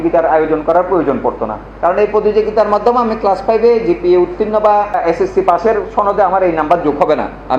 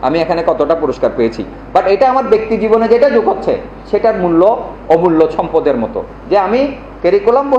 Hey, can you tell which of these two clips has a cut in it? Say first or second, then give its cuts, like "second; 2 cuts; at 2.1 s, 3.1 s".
first; 1 cut; at 5.0 s